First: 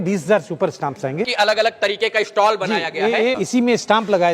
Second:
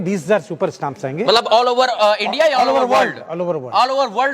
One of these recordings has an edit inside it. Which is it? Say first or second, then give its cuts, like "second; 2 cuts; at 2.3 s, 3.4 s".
first; 2 cuts; at 1.2 s, 3.4 s